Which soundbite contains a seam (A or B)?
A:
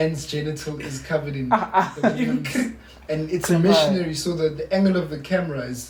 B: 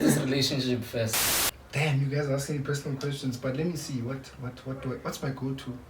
B